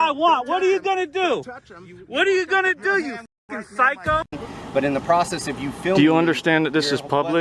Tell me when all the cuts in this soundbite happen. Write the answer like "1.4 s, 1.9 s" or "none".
4.5 s